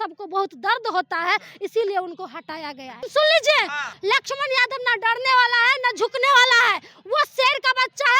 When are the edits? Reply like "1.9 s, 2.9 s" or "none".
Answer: 3.0 s, 3.9 s